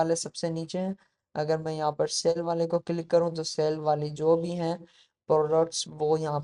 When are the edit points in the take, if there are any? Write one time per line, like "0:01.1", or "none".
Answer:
none

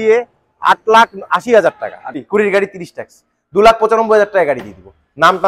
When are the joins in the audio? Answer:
0:02.2

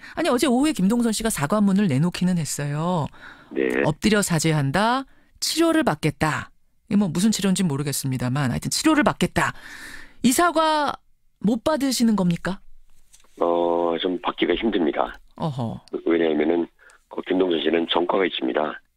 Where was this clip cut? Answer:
0:13.3

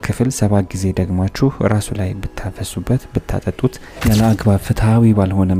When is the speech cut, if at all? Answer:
0:03.9

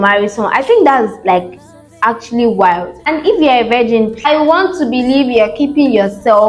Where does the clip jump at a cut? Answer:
0:02.9
0:04.2

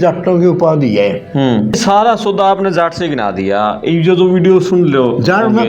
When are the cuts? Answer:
0:01.8

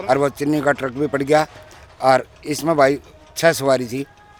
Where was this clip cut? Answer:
none

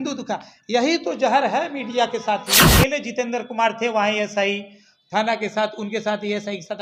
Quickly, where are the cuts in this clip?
0:02.7

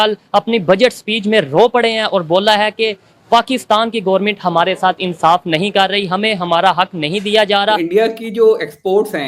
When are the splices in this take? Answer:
0:07.8

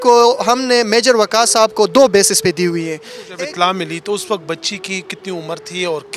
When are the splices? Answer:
0:03.3

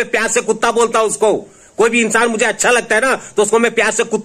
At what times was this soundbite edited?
none

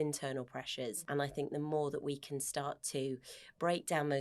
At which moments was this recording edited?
0:01.0

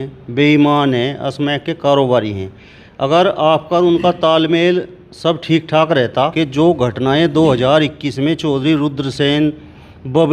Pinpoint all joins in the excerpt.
0:06.3

